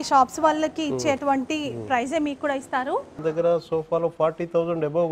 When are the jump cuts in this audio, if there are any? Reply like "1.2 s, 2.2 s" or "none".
3.2 s